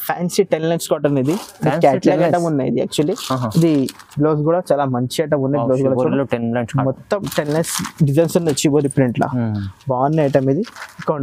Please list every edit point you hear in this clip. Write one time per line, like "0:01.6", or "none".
none